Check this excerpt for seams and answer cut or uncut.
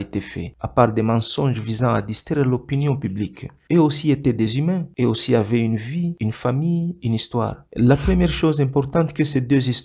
cut